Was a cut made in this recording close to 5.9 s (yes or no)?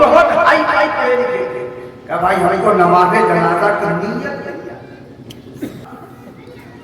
yes